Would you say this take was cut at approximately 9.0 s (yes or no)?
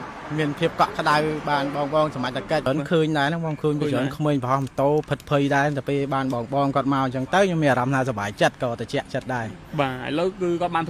no